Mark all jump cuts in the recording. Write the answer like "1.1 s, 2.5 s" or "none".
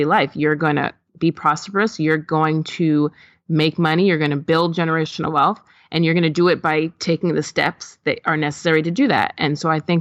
none